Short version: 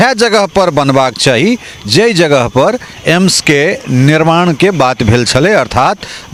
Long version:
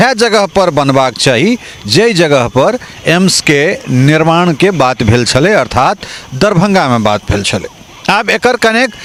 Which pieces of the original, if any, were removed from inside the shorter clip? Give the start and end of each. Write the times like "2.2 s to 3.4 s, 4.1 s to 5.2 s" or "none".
none

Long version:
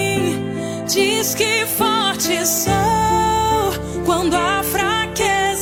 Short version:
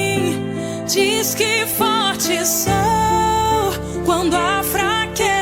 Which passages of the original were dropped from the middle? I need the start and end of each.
none

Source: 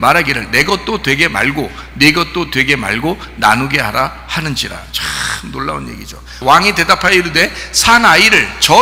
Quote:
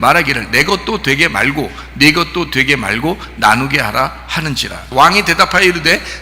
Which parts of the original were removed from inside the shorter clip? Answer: 4.7 s to 6.2 s

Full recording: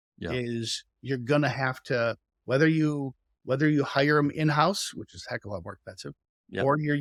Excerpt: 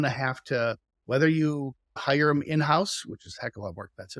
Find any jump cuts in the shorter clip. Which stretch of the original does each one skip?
3.4 s to 3.9 s

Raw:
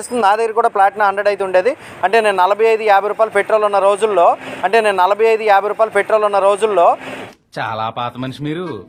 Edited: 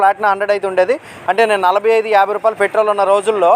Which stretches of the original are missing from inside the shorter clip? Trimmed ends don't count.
1.9 s to 4.5 s

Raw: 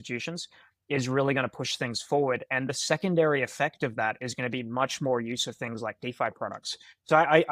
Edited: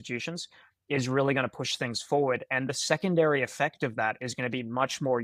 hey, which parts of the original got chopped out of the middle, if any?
none

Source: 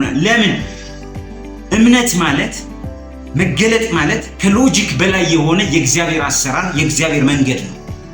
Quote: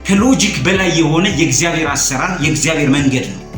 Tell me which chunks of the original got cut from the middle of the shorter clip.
none

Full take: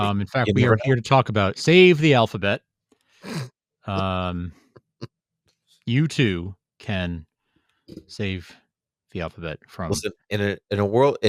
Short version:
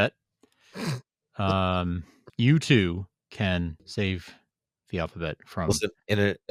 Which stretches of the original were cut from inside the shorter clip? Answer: 4.6 s to 5.6 s, 7.3 s to 8.0 s

